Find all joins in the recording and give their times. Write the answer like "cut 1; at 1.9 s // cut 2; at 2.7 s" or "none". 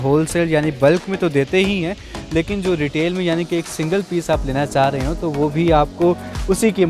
none